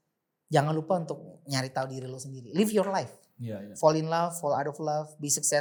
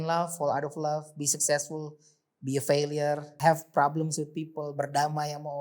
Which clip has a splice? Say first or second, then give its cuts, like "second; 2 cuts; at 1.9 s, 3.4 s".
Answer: second; 1 cut; at 3.3 s